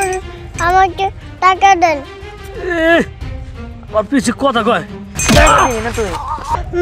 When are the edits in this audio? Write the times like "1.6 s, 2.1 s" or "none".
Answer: 5.1 s